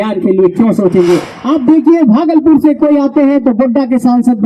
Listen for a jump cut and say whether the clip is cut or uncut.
cut